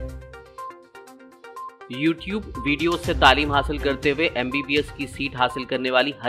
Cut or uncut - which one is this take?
cut